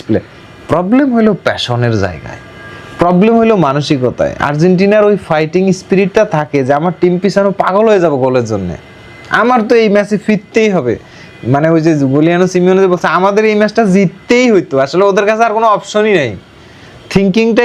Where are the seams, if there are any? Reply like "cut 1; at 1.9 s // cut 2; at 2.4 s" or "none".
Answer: none